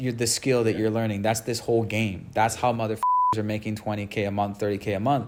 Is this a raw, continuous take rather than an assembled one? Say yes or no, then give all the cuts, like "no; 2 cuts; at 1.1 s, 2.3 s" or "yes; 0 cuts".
yes; 0 cuts